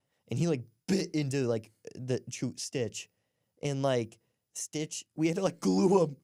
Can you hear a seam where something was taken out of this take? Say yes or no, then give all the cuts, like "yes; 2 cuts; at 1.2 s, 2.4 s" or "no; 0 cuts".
no; 0 cuts